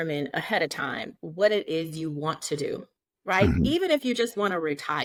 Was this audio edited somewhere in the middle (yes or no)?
no